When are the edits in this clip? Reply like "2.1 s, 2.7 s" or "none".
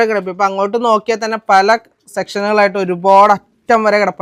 none